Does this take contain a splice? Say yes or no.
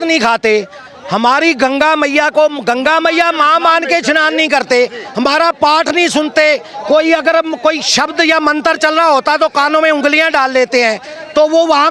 no